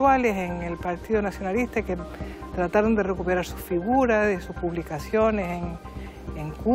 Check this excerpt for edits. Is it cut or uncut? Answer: uncut